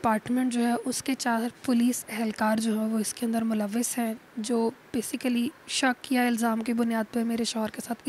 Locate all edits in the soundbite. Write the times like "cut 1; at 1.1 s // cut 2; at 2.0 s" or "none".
none